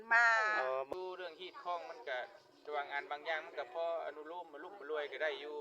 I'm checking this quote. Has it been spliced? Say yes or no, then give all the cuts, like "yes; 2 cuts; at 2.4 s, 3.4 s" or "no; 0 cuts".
yes; 1 cut; at 0.9 s